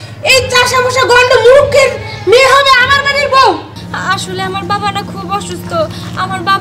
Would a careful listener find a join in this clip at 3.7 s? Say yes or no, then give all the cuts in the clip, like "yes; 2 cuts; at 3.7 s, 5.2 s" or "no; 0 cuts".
yes; 1 cut; at 3.7 s